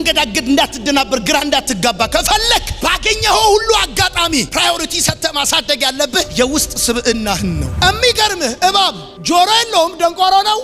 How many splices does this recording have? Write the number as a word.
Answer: one